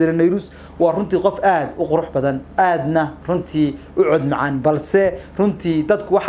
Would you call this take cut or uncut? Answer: uncut